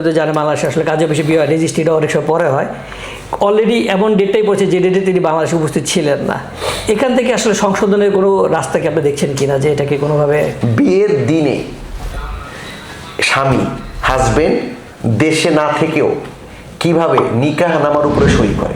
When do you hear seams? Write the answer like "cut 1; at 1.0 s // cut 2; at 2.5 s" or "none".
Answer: cut 1; at 10.6 s